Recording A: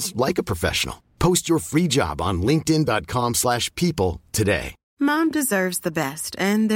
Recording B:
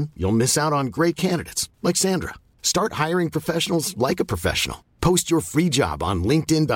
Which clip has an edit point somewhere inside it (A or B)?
A